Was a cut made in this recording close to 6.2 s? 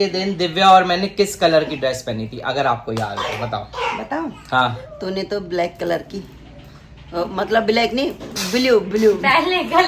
no; 0 cuts

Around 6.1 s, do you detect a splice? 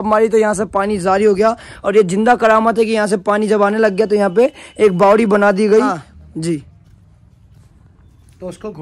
yes; 1 cut; at 6.1 s

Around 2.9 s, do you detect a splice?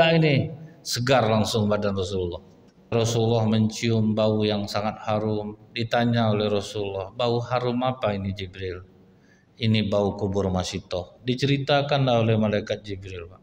yes; 1 cut; at 2.9 s

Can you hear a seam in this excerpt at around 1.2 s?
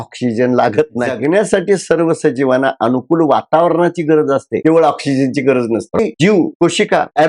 yes; 2 cuts; at 1.2 s, 6.0 s

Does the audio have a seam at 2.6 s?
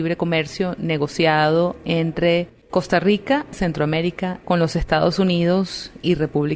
no; 0 cuts

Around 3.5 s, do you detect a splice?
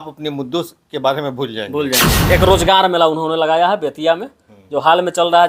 no; 1 cut; at 2.3 s

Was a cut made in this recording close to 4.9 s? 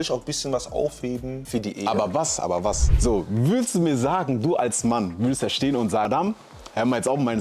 no; 3 cuts; at 1.4 s, 2.9 s, 6.1 s

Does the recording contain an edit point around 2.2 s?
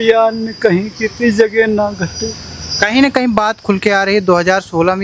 no; 0 cuts

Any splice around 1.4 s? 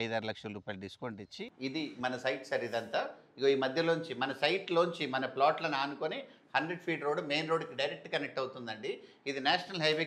yes; 1 cut; at 1.4 s

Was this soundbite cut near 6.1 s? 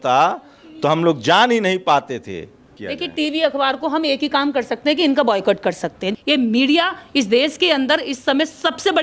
yes; 2 cuts; at 2.8 s, 6.1 s

